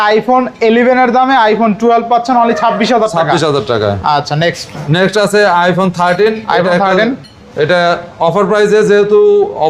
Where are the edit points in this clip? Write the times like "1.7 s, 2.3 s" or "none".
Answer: none